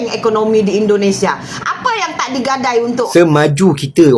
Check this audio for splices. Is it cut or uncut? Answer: cut